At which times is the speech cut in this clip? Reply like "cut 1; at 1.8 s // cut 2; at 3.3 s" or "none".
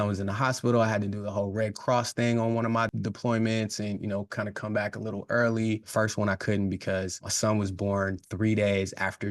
cut 1; at 5.9 s // cut 2; at 7.3 s